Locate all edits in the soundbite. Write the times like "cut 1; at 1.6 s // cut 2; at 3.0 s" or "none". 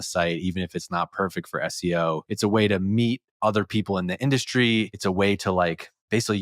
cut 1; at 2.3 s // cut 2; at 4.9 s